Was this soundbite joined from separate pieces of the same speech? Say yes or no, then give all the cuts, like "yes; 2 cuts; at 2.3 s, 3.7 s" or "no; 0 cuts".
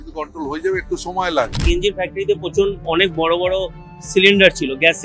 yes; 1 cut; at 1.6 s